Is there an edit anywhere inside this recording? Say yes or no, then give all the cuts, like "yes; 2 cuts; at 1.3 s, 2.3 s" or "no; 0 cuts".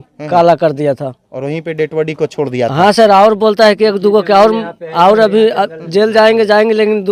no; 0 cuts